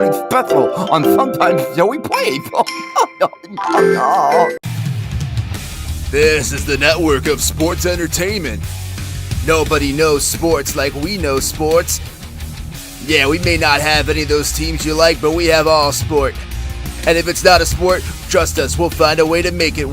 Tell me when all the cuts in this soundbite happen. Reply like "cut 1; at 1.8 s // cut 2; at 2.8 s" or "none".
cut 1; at 4.7 s

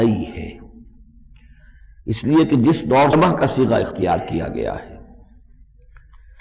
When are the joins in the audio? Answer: cut 1; at 3.1 s

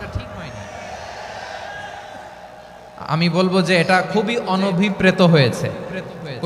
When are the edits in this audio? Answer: none

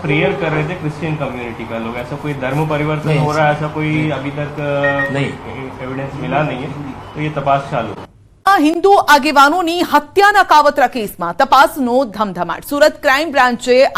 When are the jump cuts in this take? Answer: none

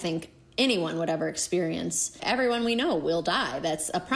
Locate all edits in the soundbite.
cut 1; at 2.2 s

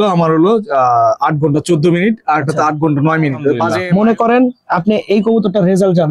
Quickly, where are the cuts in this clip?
cut 1; at 3.7 s

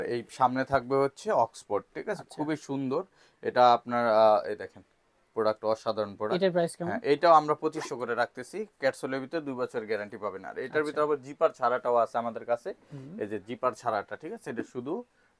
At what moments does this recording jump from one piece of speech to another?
none

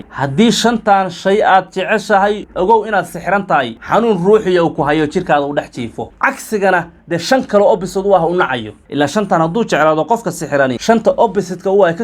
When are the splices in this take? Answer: cut 1; at 10.8 s

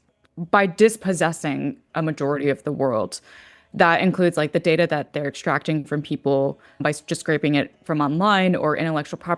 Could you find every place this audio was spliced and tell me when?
none

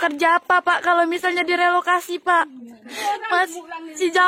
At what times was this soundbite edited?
cut 1; at 2.9 s

